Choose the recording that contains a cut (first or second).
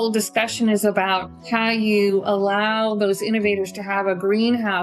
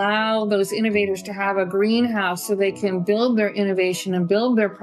first